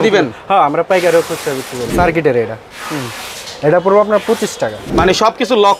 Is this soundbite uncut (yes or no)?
no